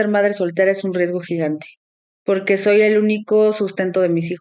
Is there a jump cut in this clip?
no; 0 cuts

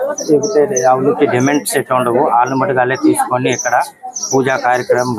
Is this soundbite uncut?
yes; 0 cuts

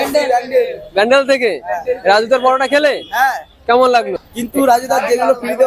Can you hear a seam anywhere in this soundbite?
yes; 1 cut; at 4.2 s

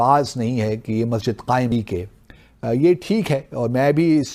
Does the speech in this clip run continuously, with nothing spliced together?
no; 1 cut; at 1.7 s

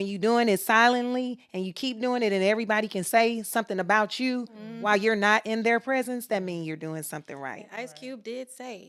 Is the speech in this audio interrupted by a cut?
no; 0 cuts

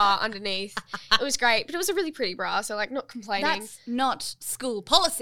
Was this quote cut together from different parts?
no; 0 cuts

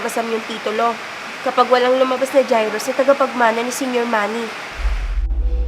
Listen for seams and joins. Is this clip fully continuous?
yes; 0 cuts

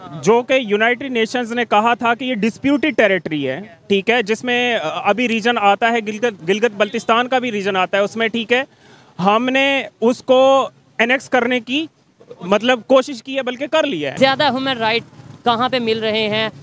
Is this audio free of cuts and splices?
no; 1 cut; at 14.1 s

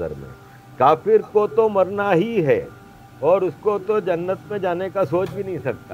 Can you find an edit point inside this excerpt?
no; 0 cuts

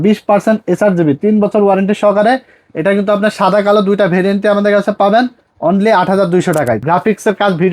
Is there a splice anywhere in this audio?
yes; 1 cut; at 6.8 s

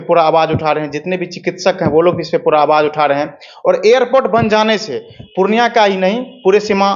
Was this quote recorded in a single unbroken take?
yes; 0 cuts

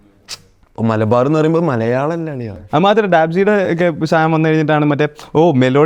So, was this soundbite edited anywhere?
yes; 1 cut; at 2.6 s

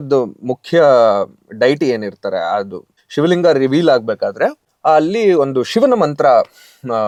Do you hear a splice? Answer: no; 0 cuts

